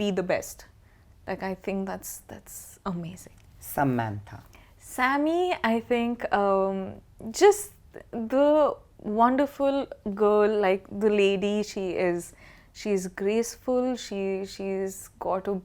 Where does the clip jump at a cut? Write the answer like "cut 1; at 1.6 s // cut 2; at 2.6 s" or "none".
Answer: none